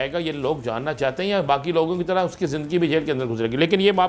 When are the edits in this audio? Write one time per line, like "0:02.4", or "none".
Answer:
none